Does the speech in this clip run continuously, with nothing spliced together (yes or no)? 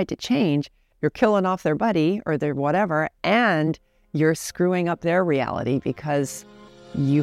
yes